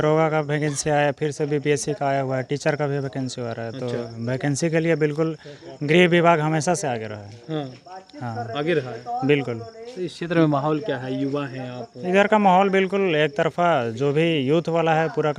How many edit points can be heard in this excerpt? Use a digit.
0